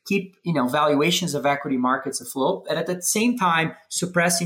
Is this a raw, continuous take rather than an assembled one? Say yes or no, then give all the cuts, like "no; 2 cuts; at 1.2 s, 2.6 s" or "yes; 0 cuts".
yes; 0 cuts